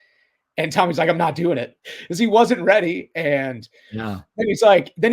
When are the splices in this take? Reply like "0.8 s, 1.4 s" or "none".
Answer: 1.7 s